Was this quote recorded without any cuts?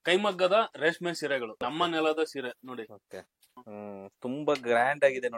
no; 2 cuts; at 1.6 s, 3.6 s

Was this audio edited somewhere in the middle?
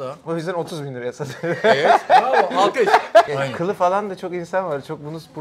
yes; 1 cut; at 3.3 s

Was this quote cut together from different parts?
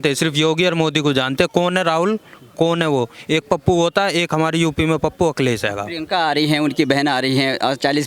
no; 0 cuts

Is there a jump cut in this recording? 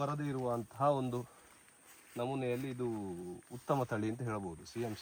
no; 0 cuts

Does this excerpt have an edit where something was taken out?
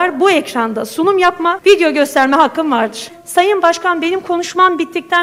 yes; 2 cuts; at 1.6 s, 3.1 s

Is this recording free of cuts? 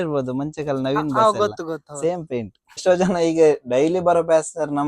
no; 1 cut; at 2.8 s

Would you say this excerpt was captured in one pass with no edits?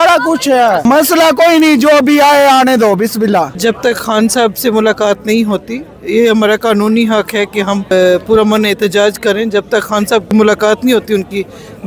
no; 4 cuts; at 0.9 s, 3.5 s, 7.9 s, 10.3 s

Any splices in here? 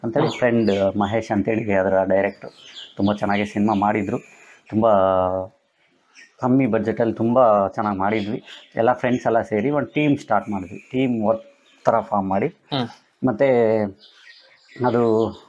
no; 0 cuts

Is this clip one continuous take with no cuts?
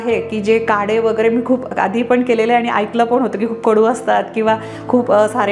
yes; 0 cuts

